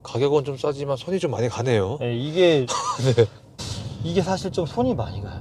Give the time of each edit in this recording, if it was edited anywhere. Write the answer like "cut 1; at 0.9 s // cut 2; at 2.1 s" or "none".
cut 1; at 3.5 s